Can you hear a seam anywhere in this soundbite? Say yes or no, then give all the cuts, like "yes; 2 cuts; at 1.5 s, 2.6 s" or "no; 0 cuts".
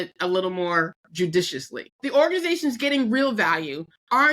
yes; 2 cuts; at 1.0 s, 1.8 s